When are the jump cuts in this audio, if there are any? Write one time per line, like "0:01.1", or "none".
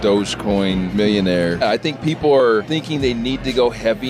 0:00.9
0:01.6
0:02.7

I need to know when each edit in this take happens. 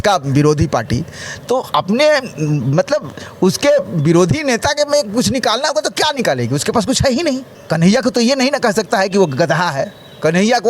0:07.5

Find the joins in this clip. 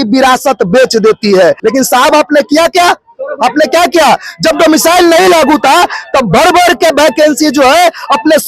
0:01.6

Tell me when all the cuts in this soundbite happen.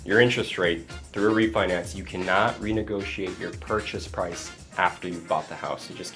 none

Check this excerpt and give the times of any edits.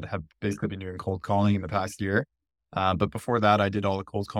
none

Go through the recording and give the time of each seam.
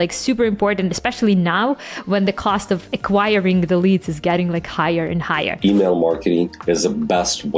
0:05.5
0:06.6

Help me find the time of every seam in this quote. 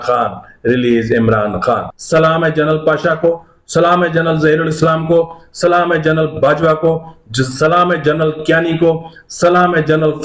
0:01.9

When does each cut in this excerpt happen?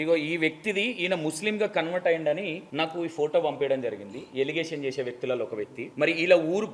0:02.6
0:05.8

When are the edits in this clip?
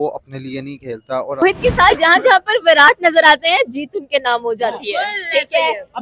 0:01.4

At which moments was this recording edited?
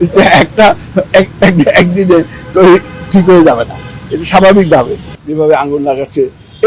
0:05.1

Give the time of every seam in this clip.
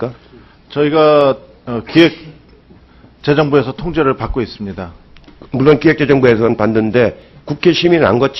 none

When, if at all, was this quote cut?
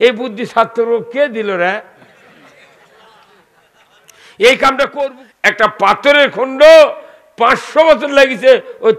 0:05.2

